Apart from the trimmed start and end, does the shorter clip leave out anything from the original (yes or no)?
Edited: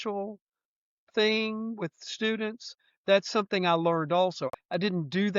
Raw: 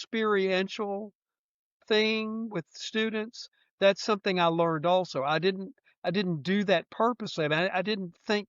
yes